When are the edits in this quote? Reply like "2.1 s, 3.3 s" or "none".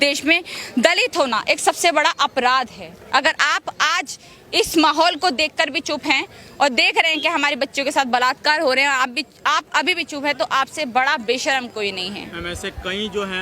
none

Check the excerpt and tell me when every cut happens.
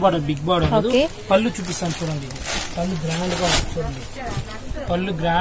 none

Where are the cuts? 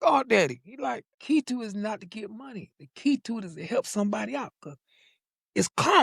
1.0 s

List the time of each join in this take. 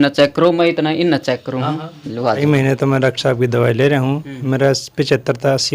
2.4 s

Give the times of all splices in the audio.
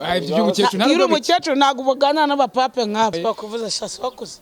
3.2 s

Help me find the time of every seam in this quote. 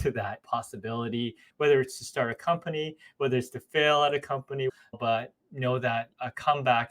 1.4 s, 4.8 s

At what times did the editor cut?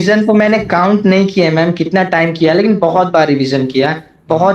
none

